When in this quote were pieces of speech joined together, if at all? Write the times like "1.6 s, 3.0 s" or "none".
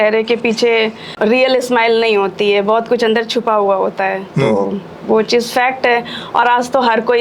none